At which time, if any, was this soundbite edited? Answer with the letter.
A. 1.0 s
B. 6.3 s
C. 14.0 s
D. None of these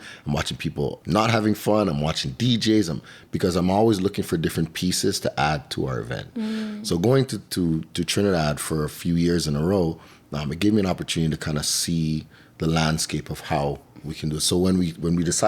A